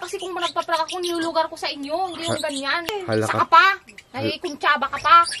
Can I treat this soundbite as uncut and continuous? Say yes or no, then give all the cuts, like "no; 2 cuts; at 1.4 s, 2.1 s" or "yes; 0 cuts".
no; 1 cut; at 2.9 s